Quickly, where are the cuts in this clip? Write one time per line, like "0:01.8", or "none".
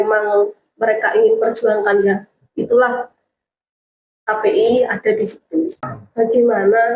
0:05.9